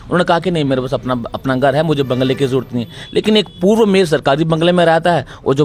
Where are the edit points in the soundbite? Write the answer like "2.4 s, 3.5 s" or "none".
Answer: none